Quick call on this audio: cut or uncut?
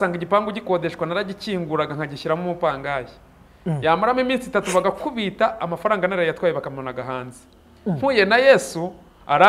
uncut